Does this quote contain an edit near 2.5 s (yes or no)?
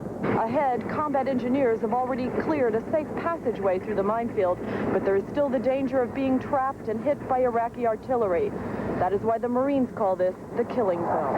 yes